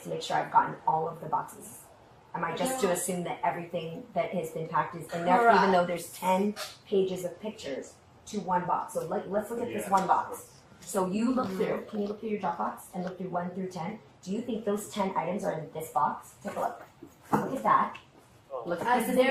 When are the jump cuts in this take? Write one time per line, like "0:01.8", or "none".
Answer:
none